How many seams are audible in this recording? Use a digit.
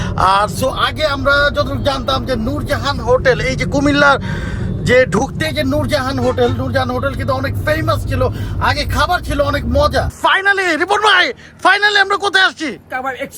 1